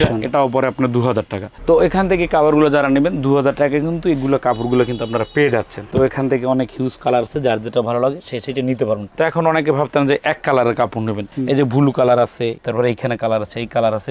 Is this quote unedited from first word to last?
yes; 0 cuts

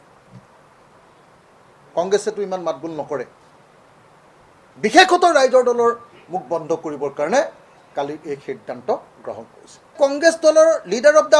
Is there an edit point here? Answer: yes; 1 cut; at 10.0 s

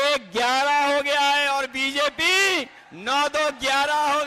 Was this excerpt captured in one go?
yes; 0 cuts

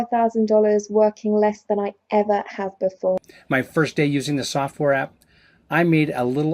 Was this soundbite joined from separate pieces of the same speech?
yes; 1 cut; at 3.2 s

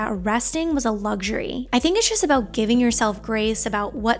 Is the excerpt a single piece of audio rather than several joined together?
no; 1 cut; at 1.7 s

